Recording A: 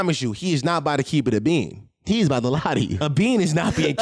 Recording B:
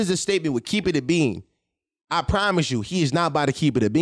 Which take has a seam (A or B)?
A